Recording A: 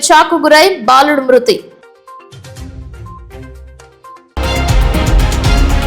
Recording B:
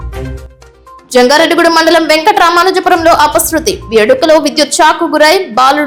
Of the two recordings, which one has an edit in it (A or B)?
A